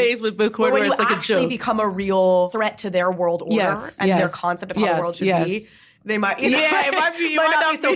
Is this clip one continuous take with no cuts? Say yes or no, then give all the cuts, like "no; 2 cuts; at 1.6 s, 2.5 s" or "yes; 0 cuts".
no; 1 cut; at 2.5 s